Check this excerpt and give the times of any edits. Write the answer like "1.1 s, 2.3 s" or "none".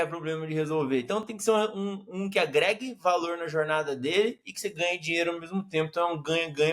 none